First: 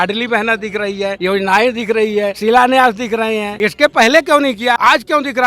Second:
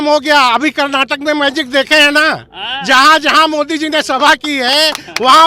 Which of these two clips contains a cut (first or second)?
first